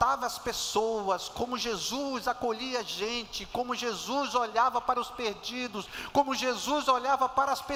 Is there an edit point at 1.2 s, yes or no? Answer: no